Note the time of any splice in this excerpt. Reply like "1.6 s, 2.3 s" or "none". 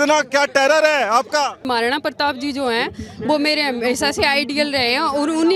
1.6 s